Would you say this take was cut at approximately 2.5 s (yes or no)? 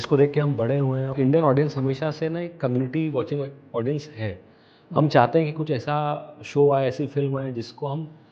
no